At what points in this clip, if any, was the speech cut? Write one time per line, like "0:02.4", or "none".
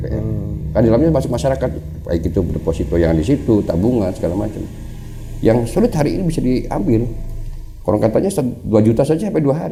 none